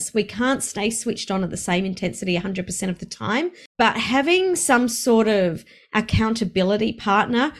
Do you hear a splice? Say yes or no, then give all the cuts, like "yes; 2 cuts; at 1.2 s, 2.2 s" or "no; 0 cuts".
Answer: yes; 1 cut; at 3.6 s